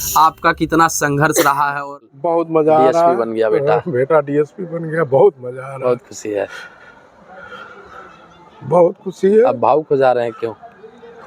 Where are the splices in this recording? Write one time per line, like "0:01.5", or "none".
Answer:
0:01.9